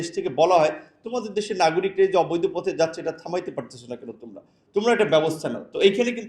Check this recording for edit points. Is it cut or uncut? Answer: uncut